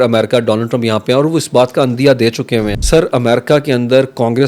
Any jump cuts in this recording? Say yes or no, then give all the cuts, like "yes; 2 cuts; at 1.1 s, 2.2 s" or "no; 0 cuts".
yes; 1 cut; at 2.8 s